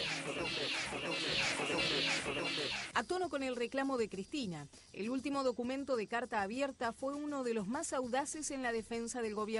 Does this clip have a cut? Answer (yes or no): no